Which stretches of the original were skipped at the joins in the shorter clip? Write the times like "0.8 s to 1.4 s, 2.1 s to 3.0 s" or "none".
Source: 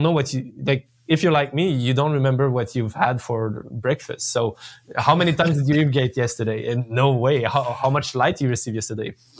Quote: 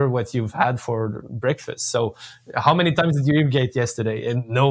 none